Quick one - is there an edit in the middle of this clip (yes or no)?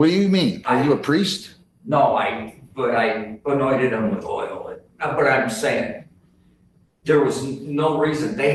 no